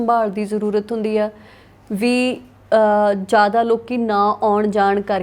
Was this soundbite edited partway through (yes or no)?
no